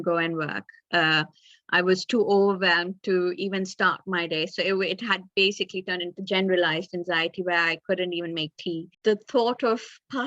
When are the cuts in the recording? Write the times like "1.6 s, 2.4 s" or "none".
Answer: 8.9 s